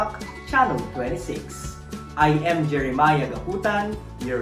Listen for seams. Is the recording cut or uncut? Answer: uncut